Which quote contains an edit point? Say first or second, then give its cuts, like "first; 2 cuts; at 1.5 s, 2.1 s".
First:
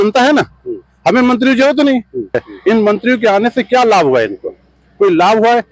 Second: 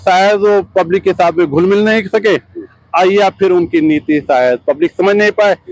first; 1 cut; at 2.5 s